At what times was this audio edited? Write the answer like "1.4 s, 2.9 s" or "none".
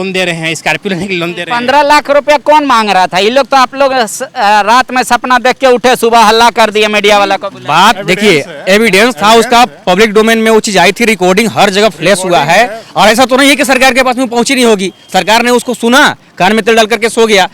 none